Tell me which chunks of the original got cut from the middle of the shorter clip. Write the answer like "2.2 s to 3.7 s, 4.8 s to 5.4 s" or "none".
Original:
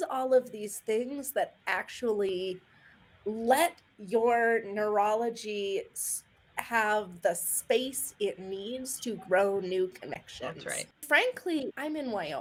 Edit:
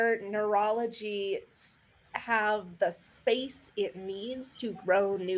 none